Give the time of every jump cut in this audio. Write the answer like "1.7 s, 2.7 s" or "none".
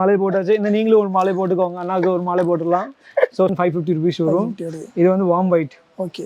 3.5 s